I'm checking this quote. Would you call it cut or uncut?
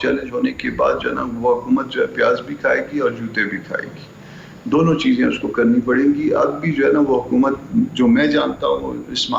uncut